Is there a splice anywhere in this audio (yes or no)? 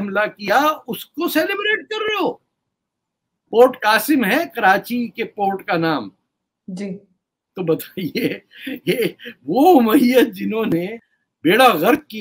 no